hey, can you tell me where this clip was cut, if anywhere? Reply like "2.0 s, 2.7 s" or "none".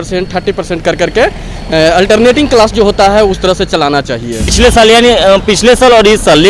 4.5 s